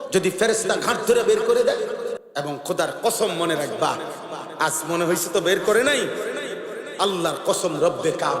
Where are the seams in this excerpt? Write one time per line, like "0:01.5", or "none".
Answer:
0:02.2